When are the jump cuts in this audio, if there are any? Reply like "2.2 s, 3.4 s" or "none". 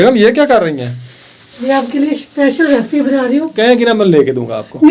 3.5 s